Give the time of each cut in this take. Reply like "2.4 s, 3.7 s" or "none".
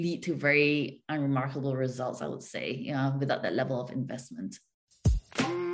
4.7 s